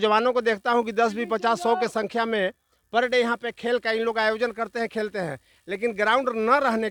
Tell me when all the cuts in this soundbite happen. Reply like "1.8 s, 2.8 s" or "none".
none

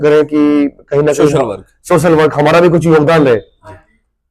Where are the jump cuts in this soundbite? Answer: none

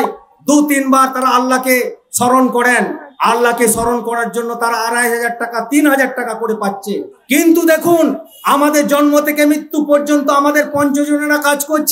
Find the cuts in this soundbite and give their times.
7.1 s

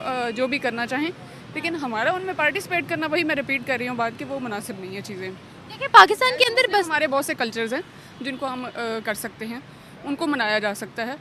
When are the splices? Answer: none

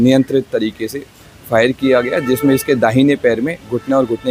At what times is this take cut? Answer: none

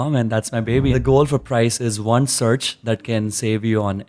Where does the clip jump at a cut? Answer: 0.9 s

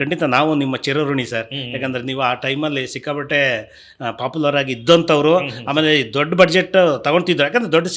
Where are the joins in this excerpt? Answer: none

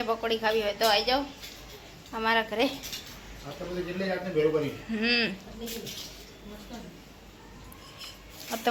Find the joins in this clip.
none

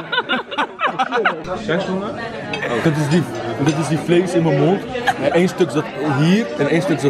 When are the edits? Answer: 1.4 s

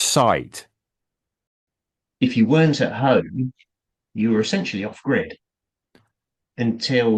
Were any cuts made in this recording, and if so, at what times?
1.4 s

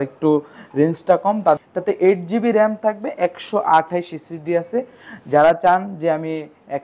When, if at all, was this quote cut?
1.6 s

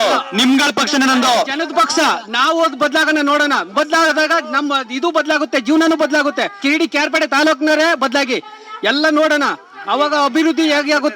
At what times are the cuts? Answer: 6.5 s

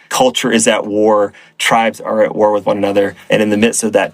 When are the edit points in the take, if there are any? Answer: 3.2 s

